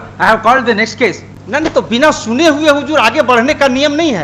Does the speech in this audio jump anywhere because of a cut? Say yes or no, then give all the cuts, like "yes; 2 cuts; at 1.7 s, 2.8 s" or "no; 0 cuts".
no; 0 cuts